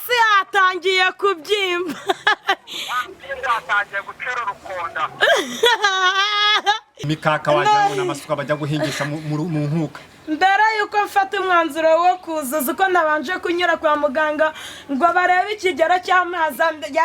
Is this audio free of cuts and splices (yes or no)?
no